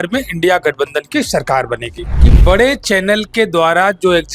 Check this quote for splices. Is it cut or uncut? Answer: cut